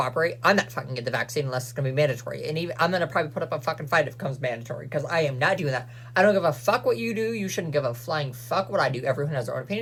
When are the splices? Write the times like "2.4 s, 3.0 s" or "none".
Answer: none